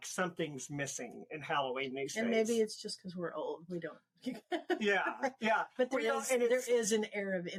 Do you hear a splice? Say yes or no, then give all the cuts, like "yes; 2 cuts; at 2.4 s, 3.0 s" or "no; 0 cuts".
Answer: no; 0 cuts